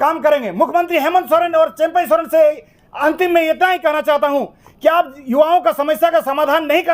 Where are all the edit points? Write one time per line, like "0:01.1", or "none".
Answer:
none

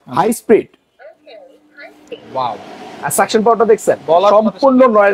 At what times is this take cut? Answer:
none

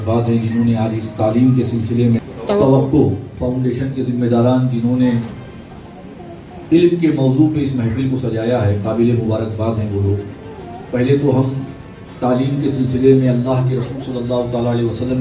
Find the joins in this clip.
0:02.2

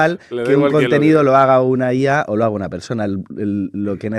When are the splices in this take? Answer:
none

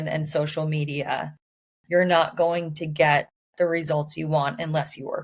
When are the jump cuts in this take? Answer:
none

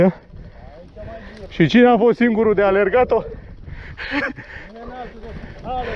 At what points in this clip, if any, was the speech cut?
0:01.5

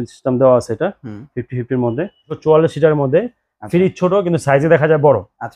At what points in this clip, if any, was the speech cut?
0:02.3

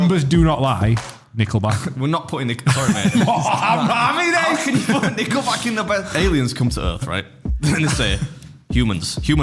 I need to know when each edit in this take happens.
0:01.8
0:06.1

